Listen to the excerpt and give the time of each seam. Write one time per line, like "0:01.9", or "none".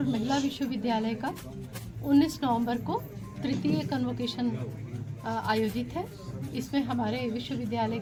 none